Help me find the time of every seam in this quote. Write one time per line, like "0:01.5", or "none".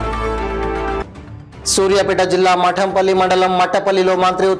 0:01.0

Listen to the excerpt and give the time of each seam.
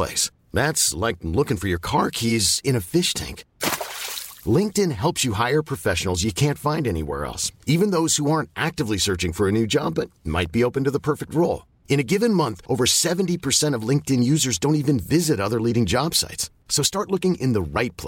none

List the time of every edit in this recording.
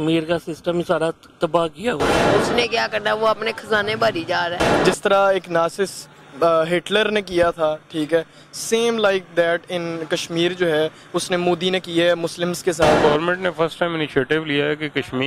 0:02.2
0:04.7
0:13.0

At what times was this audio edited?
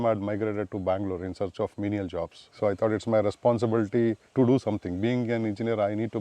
0:02.5
0:04.2

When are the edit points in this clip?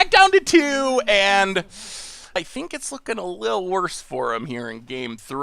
0:02.5

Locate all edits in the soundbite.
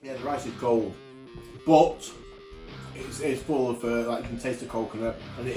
none

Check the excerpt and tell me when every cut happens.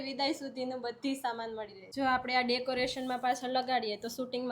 0:01.9

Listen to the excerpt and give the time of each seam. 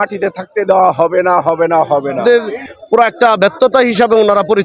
0:02.2

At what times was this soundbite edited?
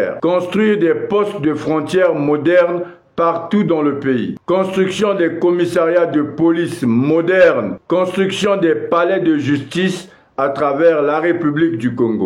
none

